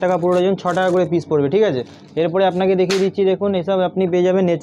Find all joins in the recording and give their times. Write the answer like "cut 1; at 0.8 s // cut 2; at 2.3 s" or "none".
none